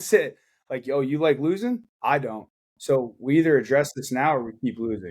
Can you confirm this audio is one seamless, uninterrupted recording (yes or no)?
no